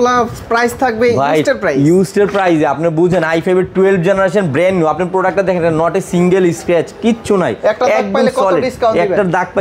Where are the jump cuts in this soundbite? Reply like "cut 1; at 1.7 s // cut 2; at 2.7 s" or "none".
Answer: none